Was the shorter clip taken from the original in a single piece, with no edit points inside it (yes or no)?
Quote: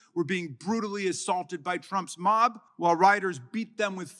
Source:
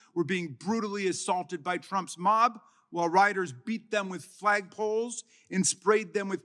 no